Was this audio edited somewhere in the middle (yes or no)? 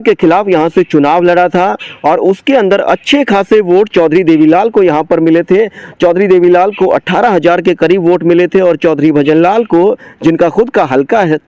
no